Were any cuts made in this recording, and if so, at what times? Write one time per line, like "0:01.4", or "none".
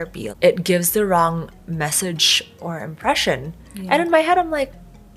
none